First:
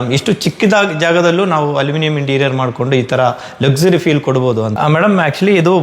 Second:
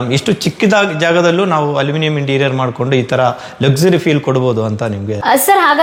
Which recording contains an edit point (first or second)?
first